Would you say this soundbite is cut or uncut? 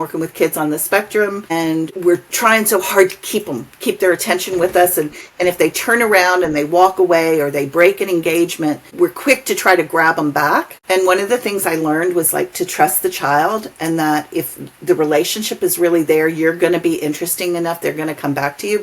cut